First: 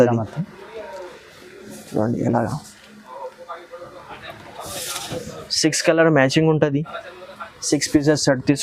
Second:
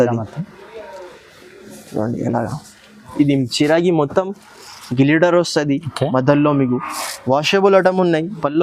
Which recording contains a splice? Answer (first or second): second